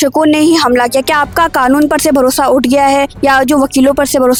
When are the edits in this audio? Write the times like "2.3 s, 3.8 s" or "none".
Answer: none